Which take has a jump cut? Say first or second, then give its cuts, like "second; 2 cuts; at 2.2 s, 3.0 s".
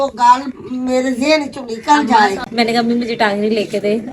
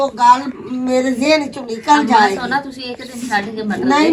first; 1 cut; at 2.5 s